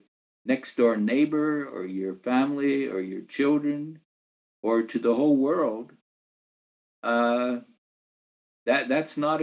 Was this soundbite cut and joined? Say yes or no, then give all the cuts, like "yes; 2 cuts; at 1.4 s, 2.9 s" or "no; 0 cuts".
no; 0 cuts